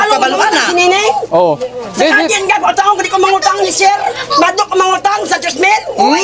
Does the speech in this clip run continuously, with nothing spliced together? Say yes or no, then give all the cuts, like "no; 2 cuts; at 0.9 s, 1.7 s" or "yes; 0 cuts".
yes; 0 cuts